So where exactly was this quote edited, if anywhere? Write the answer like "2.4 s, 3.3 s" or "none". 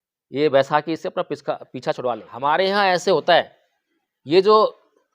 2.3 s